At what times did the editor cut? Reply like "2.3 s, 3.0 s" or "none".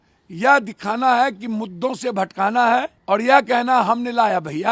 3.0 s